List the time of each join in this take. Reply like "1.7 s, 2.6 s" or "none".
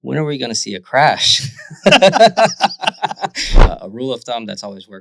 3.6 s